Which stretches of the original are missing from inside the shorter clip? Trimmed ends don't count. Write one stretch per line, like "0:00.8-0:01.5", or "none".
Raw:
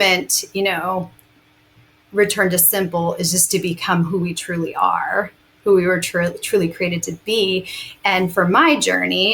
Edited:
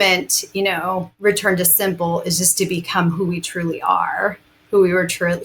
0:01.1-0:02.0

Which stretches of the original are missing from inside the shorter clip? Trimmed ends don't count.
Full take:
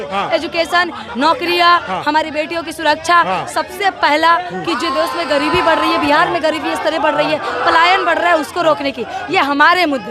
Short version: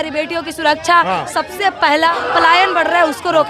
0:04.3-0:07.5

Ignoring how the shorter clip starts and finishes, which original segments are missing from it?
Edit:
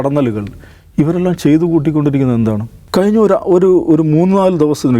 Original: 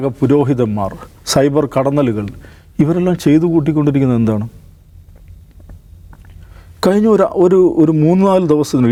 0:04.5-0:06.6

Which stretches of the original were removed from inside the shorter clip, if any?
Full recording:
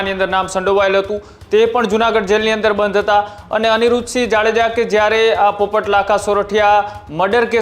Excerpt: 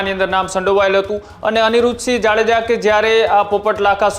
0:01.3-0:03.4

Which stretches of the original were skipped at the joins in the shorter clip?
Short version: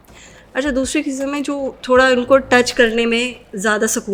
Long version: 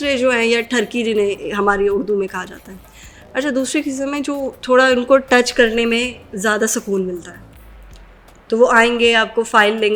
none

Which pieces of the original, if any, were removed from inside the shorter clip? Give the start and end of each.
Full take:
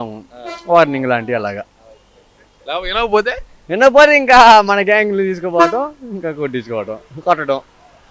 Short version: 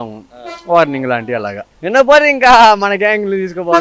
0:01.7-0:03.5

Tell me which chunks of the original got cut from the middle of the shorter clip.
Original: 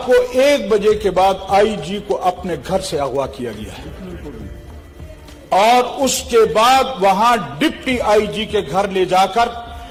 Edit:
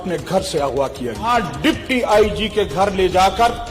0:03.7-0:07.3

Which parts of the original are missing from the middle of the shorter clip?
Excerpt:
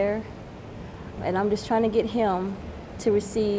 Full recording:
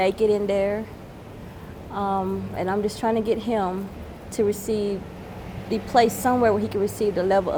0:01.8-0:02.5

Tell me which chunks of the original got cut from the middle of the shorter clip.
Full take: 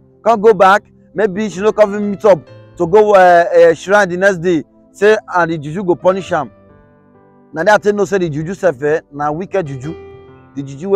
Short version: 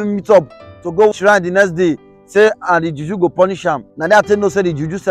0:03.1-0:03.8
0:06.6-0:07.5

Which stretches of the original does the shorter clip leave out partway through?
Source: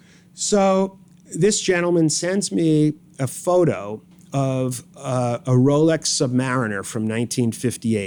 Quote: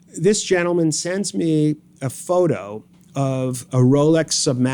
0:04.8-0:05.4

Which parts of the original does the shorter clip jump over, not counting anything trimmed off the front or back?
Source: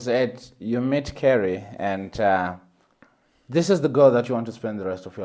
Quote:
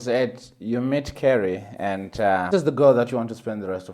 0:02.5-0:03.7

